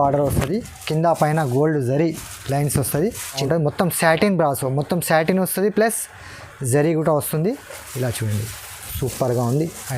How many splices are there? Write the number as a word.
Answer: one